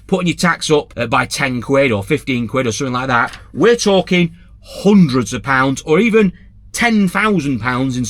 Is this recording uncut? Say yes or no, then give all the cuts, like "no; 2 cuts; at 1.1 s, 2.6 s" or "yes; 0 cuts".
no; 1 cut; at 1.0 s